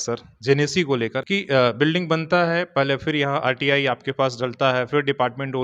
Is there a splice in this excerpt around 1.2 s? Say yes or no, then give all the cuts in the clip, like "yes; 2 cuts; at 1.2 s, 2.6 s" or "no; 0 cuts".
yes; 1 cut; at 1.2 s